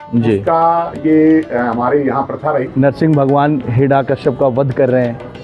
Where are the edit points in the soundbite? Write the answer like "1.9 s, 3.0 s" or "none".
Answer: 2.6 s

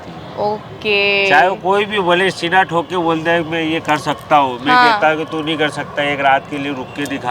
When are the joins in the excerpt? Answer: none

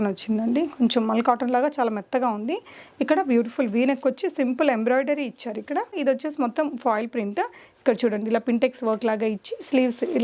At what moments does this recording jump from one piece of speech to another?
5.9 s

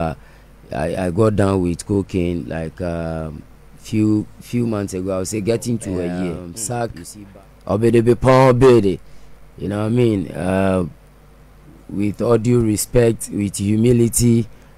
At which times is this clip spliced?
6.5 s

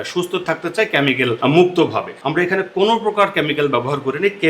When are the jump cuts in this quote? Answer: 1.4 s, 2.2 s

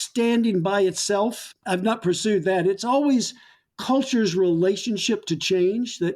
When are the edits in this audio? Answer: none

